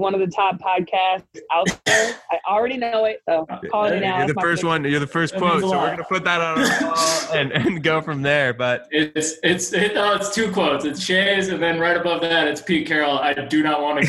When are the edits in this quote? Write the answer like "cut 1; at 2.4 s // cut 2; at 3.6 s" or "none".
cut 1; at 3.2 s